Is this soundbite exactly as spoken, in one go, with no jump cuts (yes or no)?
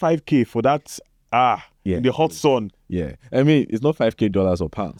yes